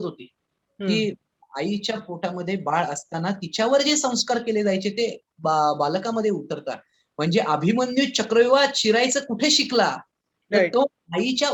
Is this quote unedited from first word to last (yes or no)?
yes